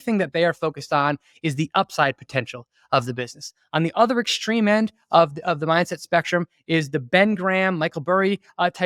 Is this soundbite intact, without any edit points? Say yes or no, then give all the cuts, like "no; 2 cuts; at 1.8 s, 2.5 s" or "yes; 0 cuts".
yes; 0 cuts